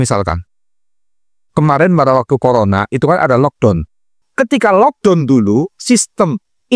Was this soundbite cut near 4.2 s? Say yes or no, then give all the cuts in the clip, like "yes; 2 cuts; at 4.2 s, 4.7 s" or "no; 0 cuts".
yes; 1 cut; at 4.2 s